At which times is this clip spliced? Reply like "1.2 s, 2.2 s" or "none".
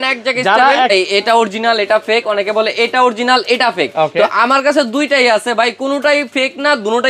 0.9 s